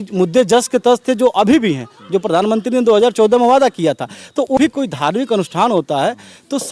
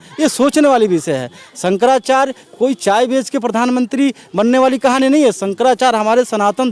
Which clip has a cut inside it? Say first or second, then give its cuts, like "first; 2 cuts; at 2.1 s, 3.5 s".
first; 1 cut; at 4.6 s